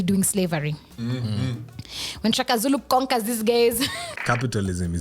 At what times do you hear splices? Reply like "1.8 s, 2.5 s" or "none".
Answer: 4.1 s